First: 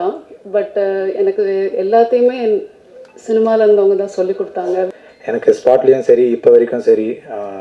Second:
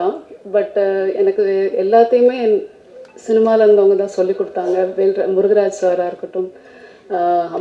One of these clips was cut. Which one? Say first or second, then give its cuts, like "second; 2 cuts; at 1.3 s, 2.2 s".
first; 1 cut; at 4.9 s